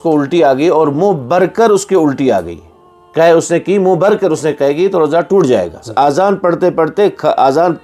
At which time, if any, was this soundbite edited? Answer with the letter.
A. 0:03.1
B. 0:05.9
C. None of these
B